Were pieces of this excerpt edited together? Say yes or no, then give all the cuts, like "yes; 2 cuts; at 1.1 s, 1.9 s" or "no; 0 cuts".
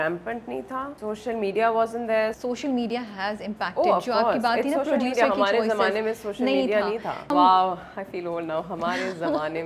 yes; 3 cuts; at 0.9 s, 2.4 s, 7.2 s